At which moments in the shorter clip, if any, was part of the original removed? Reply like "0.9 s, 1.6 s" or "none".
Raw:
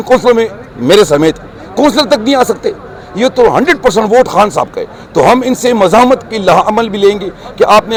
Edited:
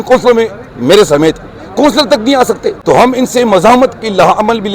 2.7 s